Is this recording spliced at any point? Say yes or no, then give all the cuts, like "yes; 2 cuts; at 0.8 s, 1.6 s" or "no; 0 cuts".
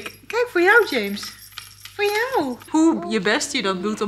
yes; 1 cut; at 2.7 s